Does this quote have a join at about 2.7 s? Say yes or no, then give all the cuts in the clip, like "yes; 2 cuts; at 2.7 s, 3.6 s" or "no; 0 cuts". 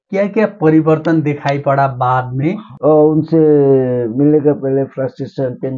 yes; 1 cut; at 2.7 s